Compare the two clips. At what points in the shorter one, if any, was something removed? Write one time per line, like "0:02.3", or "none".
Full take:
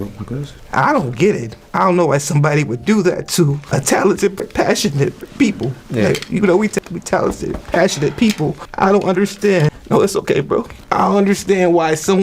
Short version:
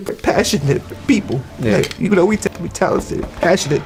none